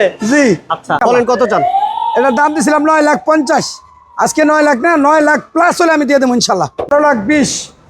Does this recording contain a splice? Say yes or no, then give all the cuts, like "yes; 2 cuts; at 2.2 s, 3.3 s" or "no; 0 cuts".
yes; 2 cuts; at 1.0 s, 6.9 s